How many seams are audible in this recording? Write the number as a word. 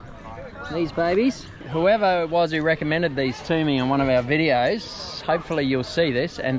one